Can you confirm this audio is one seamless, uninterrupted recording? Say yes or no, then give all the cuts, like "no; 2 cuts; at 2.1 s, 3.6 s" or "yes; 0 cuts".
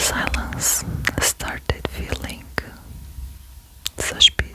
yes; 0 cuts